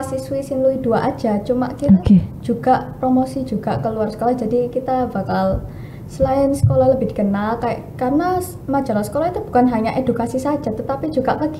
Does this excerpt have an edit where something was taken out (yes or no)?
no